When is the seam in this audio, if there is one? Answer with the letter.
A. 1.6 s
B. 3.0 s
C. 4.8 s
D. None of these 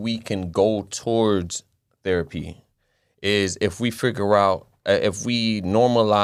D